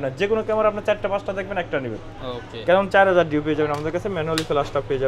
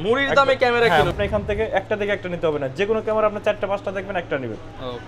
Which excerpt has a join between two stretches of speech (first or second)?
second